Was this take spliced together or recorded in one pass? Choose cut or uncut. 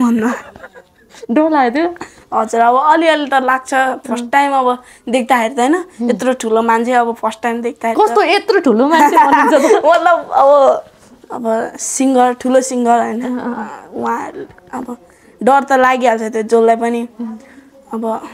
uncut